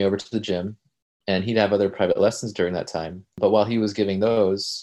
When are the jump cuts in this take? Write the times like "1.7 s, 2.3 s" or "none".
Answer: 3.3 s